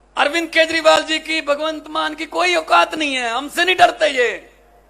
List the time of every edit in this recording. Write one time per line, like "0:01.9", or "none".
none